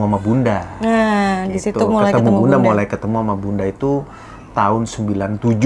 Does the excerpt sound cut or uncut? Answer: uncut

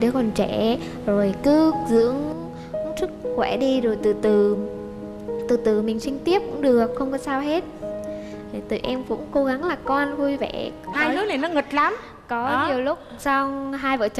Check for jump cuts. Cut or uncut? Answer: cut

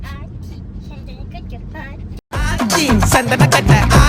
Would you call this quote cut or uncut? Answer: cut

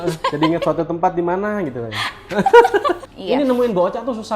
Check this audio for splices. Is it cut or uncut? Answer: cut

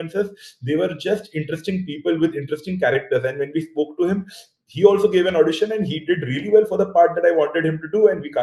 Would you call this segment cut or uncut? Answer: uncut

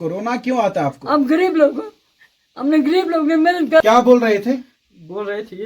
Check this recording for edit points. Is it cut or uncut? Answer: cut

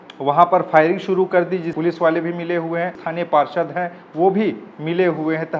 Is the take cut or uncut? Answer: cut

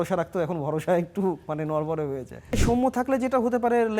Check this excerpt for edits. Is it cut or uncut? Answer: cut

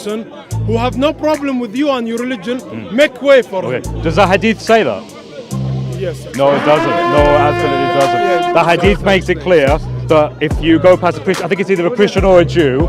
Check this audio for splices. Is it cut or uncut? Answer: uncut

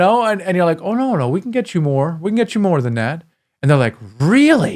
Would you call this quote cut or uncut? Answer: uncut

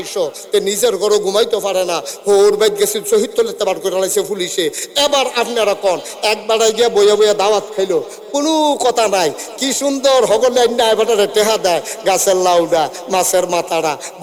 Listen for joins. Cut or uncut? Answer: uncut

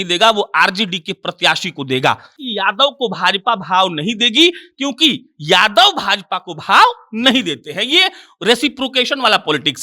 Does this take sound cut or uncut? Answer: cut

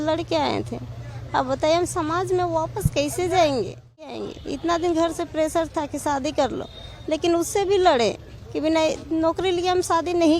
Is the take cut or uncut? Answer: cut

